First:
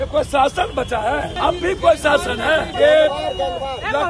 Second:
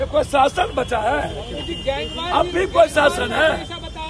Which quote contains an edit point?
first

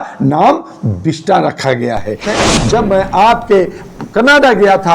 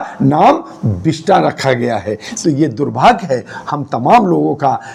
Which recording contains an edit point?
first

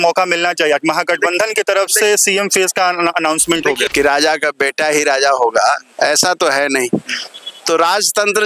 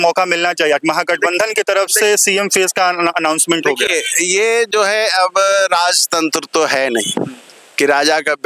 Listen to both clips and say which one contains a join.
first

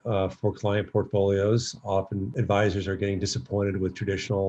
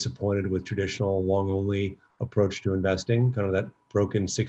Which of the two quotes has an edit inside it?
first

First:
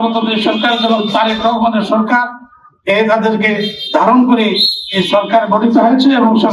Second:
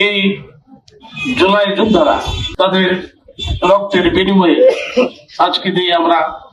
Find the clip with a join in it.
second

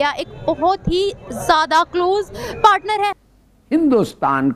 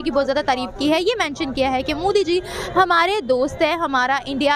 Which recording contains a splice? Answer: first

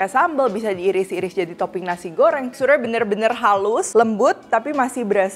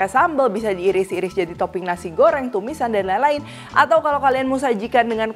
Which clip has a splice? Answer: first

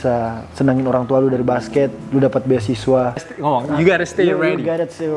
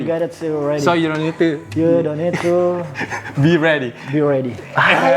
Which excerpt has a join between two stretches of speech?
first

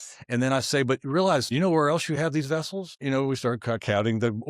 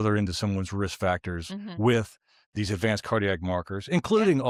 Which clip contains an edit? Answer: first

